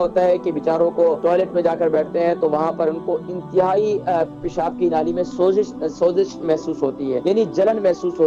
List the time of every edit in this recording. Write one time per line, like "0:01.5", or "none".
0:01.2
0:07.2

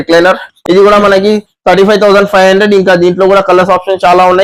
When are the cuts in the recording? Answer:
none

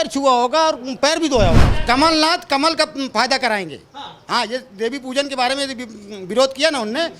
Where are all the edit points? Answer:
0:01.7

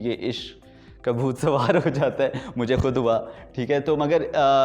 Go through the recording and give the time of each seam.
none

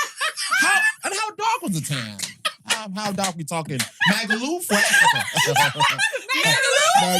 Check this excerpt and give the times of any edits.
none

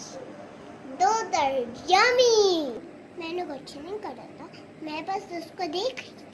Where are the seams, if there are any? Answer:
0:02.7

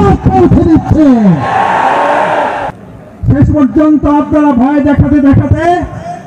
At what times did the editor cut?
0:02.6

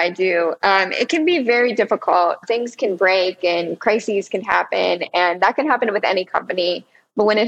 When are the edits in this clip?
0:02.4

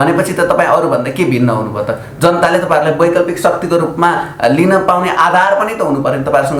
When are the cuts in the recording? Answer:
none

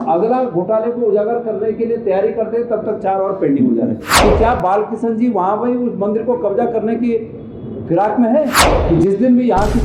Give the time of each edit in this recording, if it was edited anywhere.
0:04.1
0:08.6

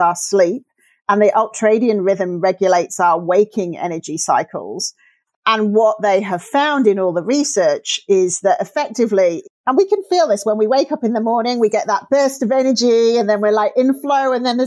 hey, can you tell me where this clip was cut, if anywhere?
none

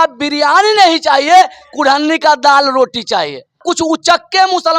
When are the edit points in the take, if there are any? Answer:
0:03.6

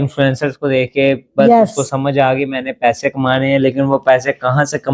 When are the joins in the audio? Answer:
none

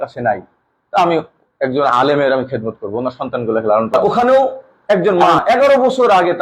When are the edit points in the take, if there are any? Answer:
0:03.9

